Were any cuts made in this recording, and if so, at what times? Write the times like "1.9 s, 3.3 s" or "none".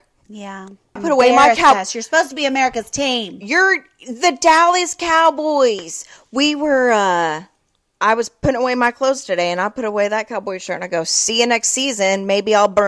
1.0 s